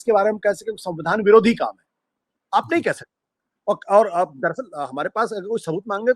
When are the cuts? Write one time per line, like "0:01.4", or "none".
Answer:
none